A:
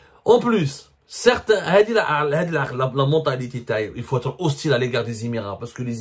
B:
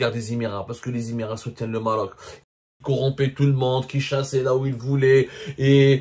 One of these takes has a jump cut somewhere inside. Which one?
B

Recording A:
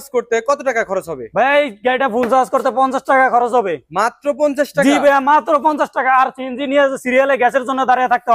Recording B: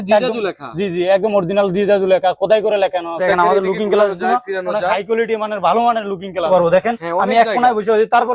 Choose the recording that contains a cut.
B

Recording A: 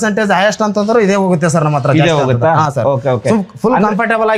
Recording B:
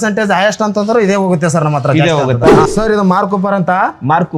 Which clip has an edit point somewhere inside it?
B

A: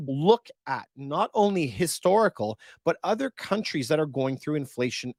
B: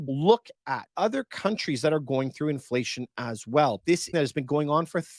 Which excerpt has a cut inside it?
B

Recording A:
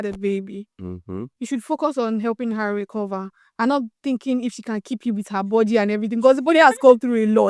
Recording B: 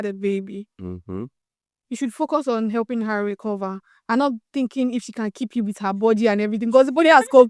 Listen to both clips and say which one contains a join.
A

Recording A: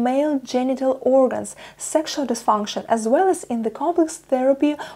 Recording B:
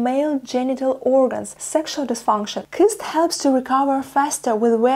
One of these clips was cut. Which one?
B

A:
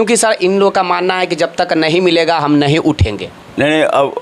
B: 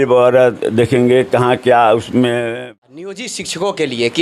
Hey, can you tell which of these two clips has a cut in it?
B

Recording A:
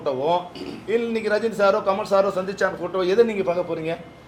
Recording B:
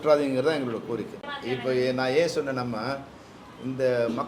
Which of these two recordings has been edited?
B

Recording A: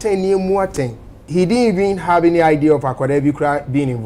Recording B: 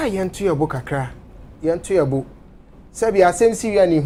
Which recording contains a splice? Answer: A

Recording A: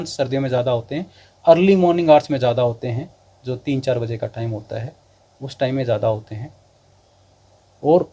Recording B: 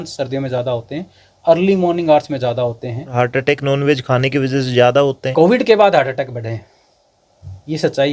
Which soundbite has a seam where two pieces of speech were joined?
B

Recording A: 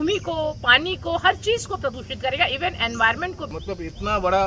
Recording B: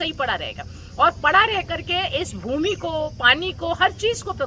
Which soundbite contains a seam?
A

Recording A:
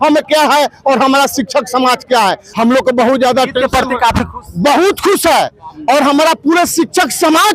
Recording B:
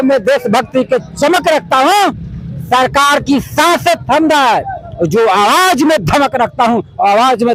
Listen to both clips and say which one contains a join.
A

